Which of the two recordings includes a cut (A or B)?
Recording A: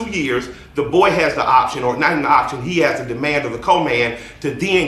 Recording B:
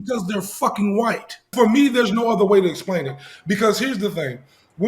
B